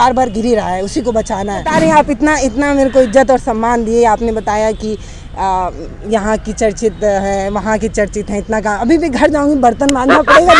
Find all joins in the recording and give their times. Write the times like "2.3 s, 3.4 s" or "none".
1.7 s